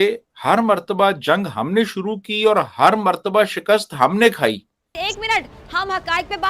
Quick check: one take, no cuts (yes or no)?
no